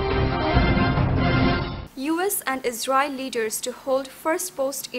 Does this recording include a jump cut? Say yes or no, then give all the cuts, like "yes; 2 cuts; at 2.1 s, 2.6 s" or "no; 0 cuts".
yes; 1 cut; at 1.6 s